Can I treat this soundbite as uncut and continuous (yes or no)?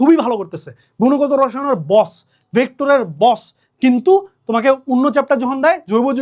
yes